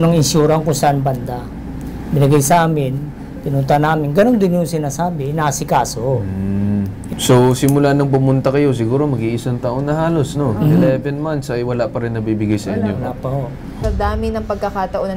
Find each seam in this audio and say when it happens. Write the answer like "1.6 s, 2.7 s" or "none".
7.0 s, 13.8 s